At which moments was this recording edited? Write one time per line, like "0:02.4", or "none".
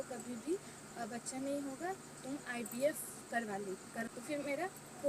0:04.1